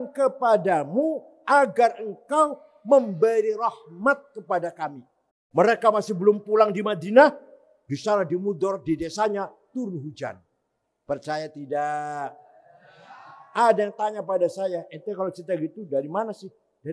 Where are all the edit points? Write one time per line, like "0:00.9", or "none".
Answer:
0:05.4